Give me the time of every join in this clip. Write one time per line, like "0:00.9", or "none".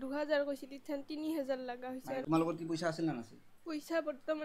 0:02.2